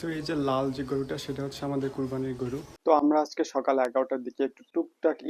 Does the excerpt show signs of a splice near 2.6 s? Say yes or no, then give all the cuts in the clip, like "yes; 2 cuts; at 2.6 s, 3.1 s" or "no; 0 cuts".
yes; 1 cut; at 2.6 s